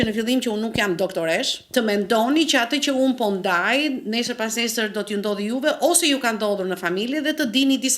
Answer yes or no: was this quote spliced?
yes